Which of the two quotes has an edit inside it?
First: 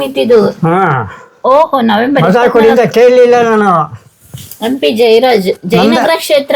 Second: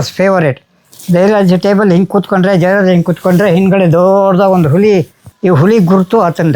second; 1 cut; at 5.2 s

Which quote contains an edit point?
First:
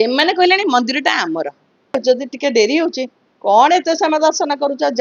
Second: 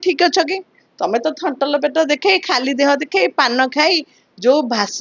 first; 1 cut; at 2.0 s

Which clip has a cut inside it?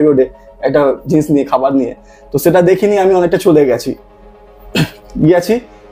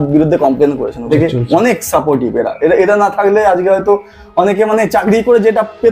second; 1 cut; at 1.1 s

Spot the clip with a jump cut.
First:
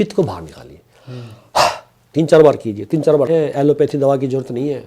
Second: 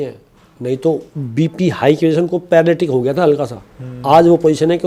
first; 1 cut; at 3.3 s

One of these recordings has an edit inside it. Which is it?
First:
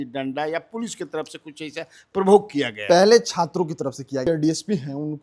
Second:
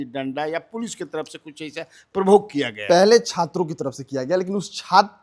first; 1 cut; at 4.2 s

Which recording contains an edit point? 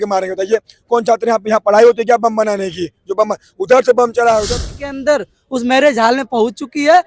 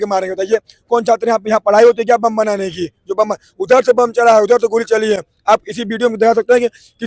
first; 1 cut; at 4.5 s

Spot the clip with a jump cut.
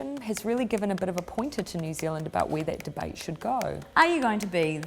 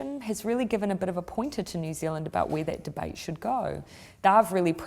first; 1 cut; at 3.8 s

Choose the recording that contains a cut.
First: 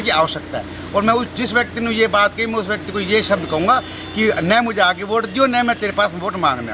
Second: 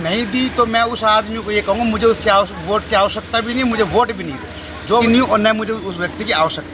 second; 1 cut; at 5.0 s

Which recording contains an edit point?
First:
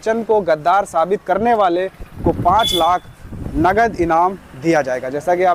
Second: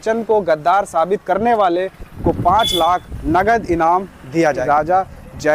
second; 2 cuts; at 3.1 s, 4.6 s

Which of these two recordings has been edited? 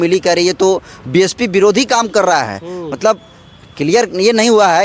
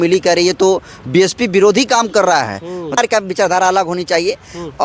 second; 1 cut; at 3.0 s

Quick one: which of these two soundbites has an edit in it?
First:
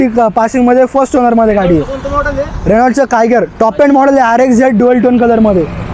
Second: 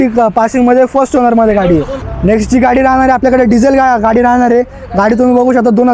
second; 1 cut; at 2.0 s

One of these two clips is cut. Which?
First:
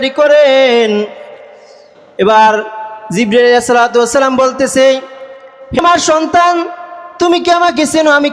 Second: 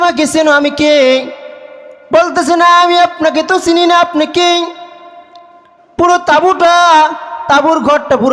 first; 1 cut; at 5.8 s

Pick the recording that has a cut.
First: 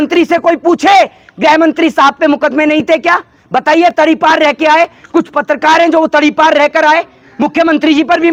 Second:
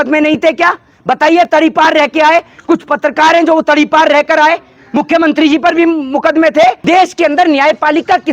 second; 1 cut; at 6.8 s

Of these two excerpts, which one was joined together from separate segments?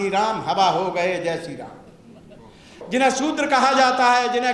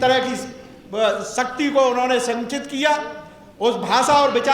first; 1 cut; at 2.8 s

